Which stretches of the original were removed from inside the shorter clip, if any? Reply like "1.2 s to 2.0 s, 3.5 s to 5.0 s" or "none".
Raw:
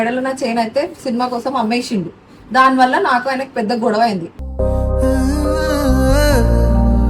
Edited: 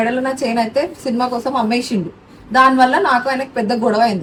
none